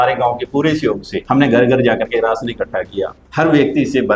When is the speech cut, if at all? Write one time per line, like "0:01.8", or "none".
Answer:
0:01.1
0:03.2

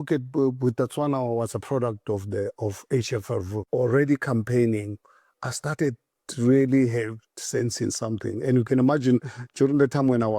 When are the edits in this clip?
0:03.6

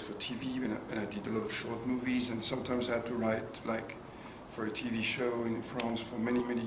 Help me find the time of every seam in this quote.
none

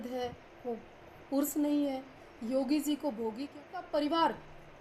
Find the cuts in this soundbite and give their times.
0:03.6

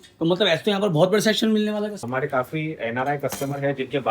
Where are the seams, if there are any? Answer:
0:02.0

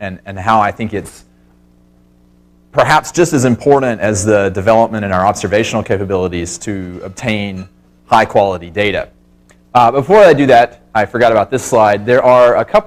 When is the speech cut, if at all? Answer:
none

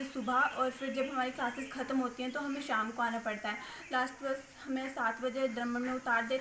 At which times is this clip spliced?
none

